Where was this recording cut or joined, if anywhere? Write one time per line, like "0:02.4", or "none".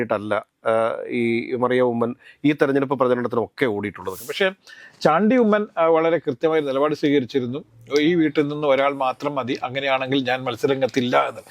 0:04.2